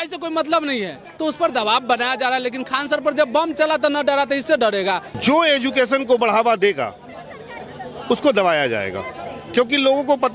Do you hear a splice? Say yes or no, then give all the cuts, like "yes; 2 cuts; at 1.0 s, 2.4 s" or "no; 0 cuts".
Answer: yes; 2 cuts; at 1.0 s, 5.1 s